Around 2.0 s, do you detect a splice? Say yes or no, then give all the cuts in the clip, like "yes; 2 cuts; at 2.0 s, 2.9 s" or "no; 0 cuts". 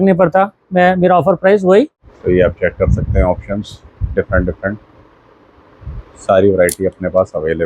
yes; 1 cut; at 2.0 s